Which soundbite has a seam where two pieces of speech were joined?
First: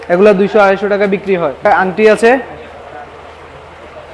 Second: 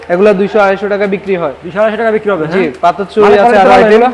first; 1 cut; at 1.7 s

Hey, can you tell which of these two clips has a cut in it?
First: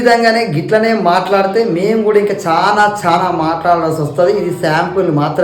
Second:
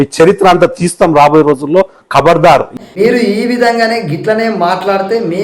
second; 1 cut; at 2.6 s

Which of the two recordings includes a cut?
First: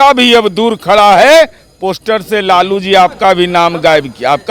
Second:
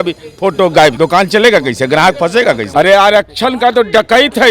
second; 2 cuts; at 0.9 s, 2.6 s

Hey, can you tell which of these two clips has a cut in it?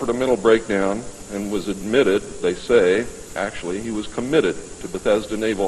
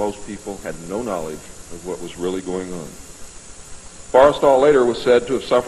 first; 1 cut; at 3.3 s

